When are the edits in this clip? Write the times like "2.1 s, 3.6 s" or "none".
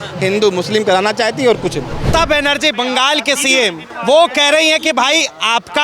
2.1 s, 3.9 s